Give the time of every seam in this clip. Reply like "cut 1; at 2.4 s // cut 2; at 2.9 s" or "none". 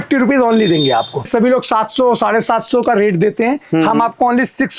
cut 1; at 1.3 s